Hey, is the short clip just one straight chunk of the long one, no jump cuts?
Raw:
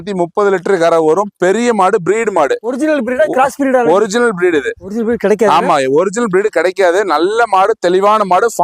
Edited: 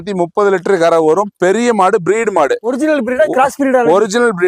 yes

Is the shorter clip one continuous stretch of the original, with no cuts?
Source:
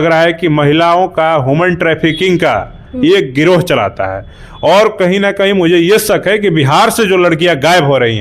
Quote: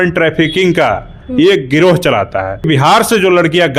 no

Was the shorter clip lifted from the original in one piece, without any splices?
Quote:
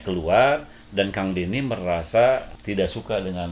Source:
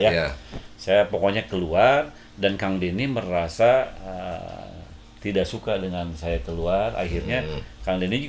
no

